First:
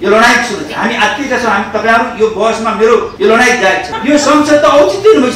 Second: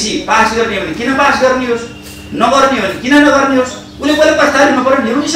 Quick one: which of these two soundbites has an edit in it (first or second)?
first